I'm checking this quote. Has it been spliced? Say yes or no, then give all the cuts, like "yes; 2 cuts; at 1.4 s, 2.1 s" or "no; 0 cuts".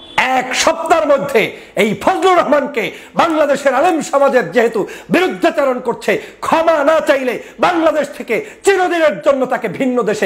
no; 0 cuts